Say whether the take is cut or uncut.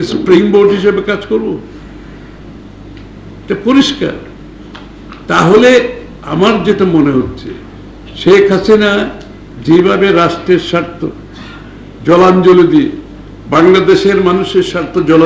uncut